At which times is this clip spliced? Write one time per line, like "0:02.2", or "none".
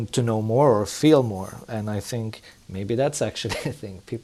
none